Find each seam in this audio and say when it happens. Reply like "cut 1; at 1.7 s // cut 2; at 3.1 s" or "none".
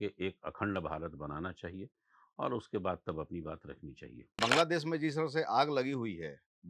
cut 1; at 4.4 s